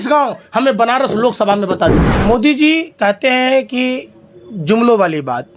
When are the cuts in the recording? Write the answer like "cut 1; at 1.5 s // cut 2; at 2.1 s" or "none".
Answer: cut 1; at 2.1 s